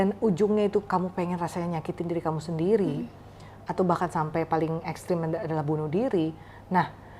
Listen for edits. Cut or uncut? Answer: uncut